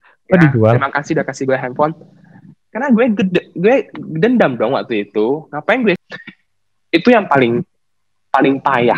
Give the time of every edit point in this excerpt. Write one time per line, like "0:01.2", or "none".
0:06.0